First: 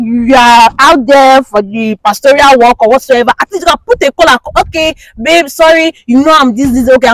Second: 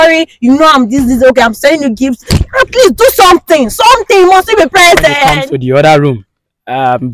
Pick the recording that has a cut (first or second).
second